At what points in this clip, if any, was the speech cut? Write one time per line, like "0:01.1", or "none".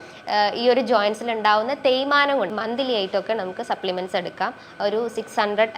0:02.5